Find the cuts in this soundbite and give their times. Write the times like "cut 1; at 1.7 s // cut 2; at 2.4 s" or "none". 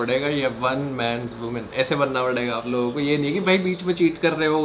none